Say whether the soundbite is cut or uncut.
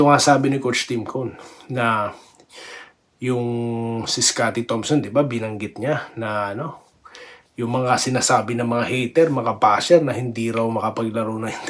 uncut